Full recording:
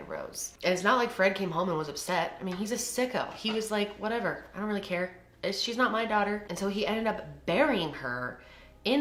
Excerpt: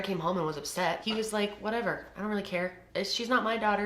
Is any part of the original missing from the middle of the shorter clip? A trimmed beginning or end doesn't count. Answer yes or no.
yes